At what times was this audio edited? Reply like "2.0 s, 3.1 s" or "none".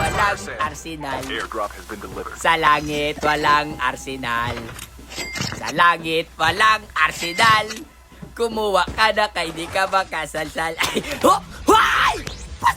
none